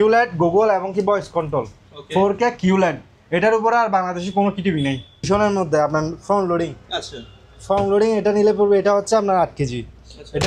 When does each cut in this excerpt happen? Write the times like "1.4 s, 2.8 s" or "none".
5.3 s